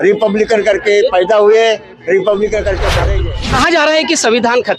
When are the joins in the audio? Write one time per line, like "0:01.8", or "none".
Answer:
0:03.0